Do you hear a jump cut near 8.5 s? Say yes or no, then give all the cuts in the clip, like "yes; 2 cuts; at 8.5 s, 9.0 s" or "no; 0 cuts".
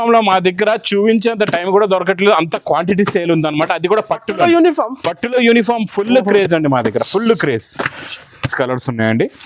yes; 1 cut; at 8.5 s